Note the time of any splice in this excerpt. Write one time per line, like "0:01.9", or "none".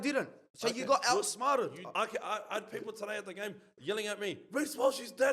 0:01.8